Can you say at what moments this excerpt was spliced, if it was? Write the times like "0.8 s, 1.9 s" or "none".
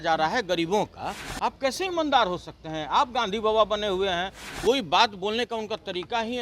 4.4 s